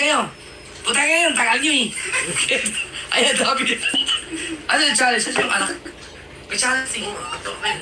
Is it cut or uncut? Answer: uncut